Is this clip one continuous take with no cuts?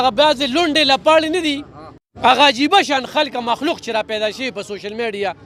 yes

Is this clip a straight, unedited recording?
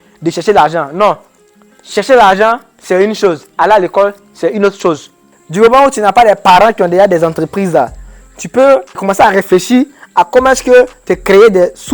no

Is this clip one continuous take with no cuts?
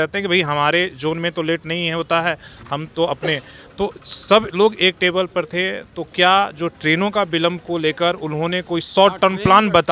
yes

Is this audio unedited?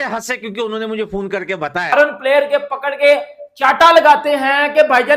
no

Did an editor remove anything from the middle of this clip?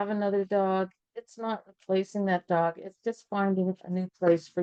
no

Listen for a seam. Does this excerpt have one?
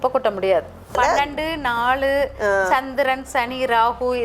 yes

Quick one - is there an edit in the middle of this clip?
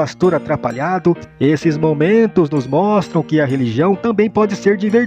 yes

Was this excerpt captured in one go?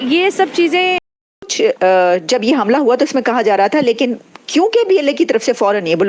no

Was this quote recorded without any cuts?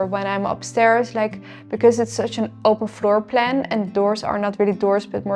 yes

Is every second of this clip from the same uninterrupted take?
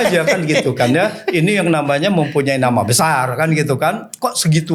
yes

